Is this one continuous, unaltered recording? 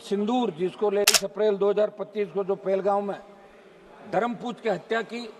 no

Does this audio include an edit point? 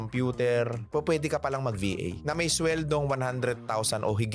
no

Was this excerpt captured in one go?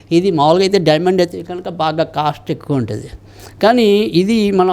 yes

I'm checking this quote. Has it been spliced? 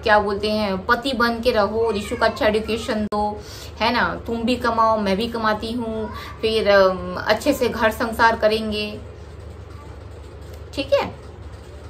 no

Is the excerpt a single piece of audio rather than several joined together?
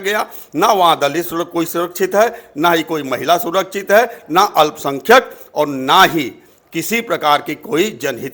yes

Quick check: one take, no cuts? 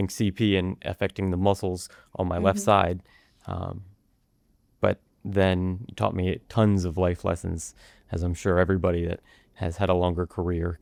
yes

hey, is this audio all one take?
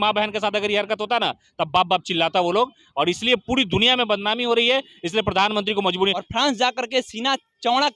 no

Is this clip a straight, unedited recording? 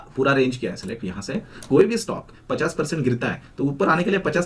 no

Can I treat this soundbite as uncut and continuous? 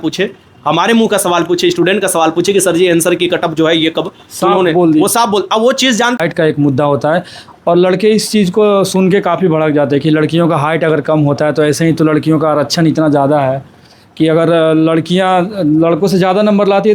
no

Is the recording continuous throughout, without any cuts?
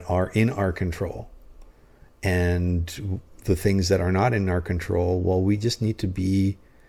yes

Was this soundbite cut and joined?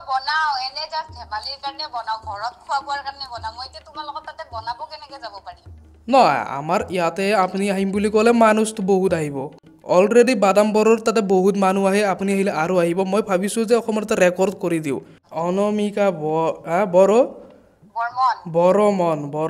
yes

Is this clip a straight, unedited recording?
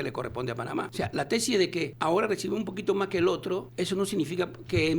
no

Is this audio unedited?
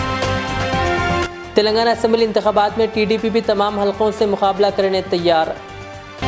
no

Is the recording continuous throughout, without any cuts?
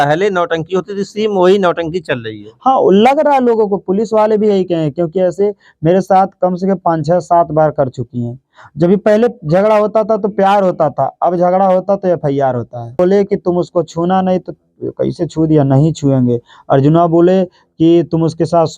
no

